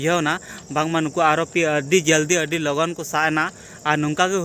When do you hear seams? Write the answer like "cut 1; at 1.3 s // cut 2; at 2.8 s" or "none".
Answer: none